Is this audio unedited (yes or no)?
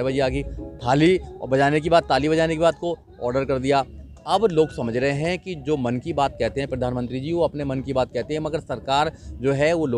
yes